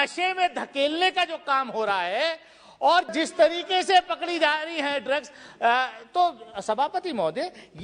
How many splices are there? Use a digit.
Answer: 1